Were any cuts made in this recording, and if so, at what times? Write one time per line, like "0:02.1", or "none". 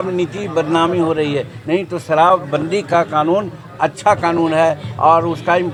none